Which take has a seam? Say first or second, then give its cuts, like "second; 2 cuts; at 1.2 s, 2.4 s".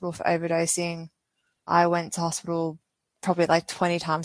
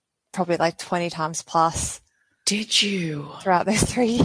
first; 1 cut; at 1.7 s